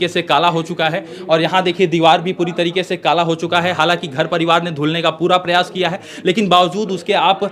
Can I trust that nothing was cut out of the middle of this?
yes; 0 cuts

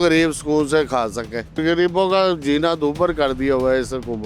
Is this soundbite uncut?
no; 1 cut; at 1.6 s

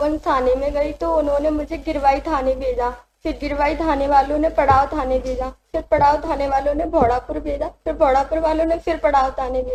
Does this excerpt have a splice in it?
no; 0 cuts

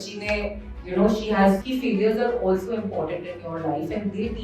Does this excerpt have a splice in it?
yes; 1 cut; at 1.6 s

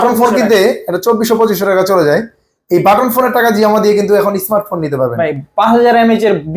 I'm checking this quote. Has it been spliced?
no; 0 cuts

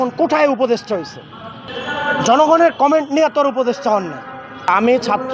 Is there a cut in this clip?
no; 0 cuts

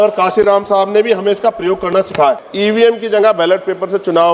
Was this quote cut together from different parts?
yes; 1 cut; at 2.5 s

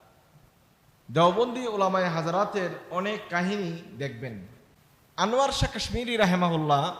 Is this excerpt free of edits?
no; 1 cut; at 5.3 s

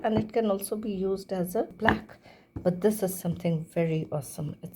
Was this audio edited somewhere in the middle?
yes; 1 cut; at 1.7 s

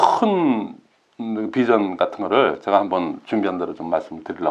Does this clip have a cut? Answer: no; 0 cuts

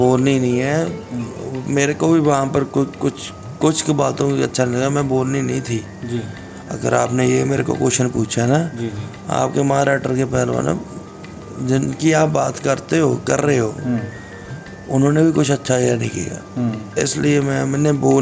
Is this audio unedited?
yes; 0 cuts

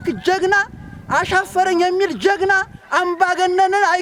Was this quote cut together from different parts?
no; 0 cuts

